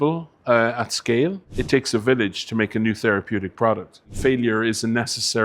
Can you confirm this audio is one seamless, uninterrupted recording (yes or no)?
no